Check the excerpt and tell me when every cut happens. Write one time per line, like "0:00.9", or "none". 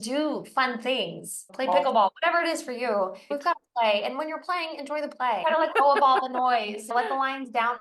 0:01.5
0:03.3
0:05.4
0:06.9